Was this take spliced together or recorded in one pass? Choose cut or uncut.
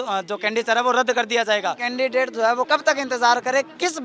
cut